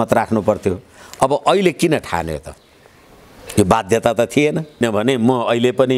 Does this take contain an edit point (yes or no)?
no